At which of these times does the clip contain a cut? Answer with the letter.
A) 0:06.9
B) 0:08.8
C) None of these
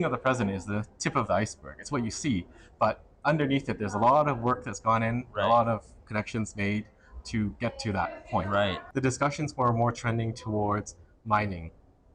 B